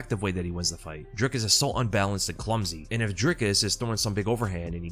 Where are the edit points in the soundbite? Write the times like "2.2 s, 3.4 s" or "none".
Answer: none